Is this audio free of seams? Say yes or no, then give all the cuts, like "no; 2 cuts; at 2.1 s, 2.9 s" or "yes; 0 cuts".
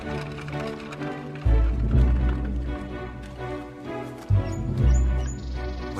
yes; 0 cuts